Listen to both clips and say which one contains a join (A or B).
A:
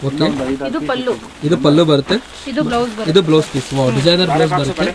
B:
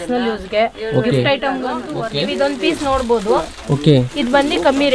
B